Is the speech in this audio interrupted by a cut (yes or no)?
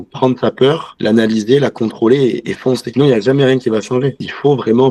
no